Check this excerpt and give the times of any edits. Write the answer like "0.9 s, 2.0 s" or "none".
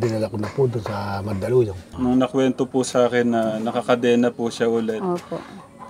1.8 s